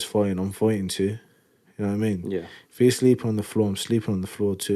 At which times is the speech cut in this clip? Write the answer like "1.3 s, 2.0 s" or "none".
none